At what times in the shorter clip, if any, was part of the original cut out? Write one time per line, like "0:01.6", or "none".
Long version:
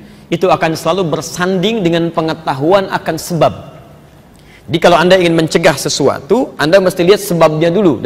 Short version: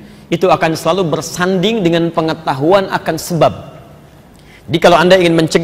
none